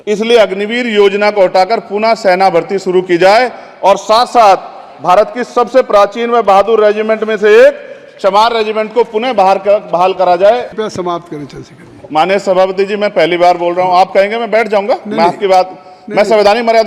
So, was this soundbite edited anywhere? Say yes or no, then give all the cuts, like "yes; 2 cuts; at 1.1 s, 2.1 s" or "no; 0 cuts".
yes; 1 cut; at 10.7 s